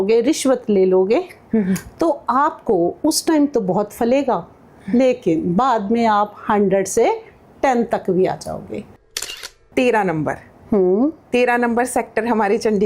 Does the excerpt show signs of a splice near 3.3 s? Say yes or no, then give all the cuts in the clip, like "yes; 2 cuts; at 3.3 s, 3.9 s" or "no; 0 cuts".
no; 1 cut; at 9.5 s